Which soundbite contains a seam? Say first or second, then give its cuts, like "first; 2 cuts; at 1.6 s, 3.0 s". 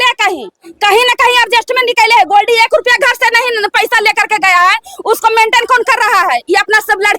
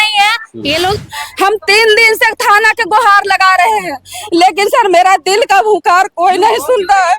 second; 1 cut; at 1.0 s